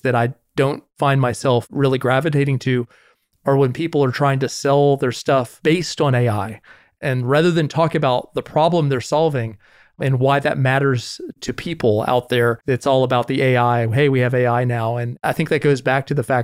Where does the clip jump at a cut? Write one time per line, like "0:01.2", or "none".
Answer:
0:12.6
0:15.1